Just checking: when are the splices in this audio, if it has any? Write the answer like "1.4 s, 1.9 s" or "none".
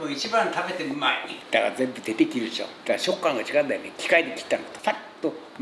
none